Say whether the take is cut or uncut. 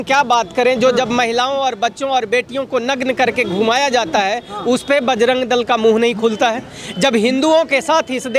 uncut